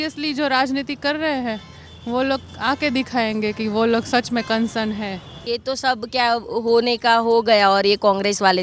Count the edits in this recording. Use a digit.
1